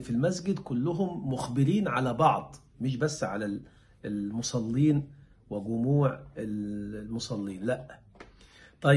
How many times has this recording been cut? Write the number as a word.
zero